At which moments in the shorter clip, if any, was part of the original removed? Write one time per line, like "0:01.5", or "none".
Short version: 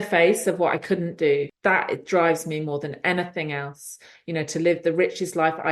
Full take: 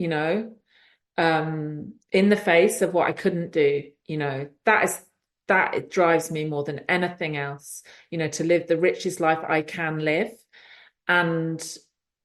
0:01.5